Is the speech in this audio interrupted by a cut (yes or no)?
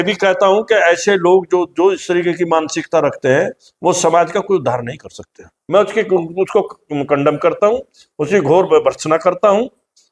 yes